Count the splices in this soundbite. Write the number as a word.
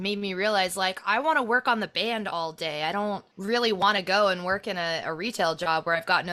zero